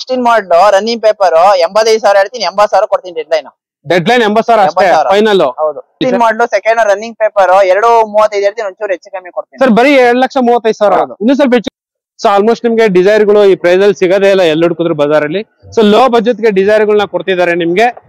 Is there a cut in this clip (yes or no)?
yes